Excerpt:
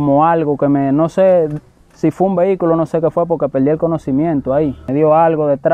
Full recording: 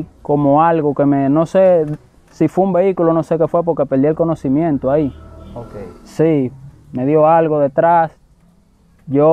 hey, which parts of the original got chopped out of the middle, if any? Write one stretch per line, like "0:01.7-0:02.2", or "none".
0:05.2-0:06.9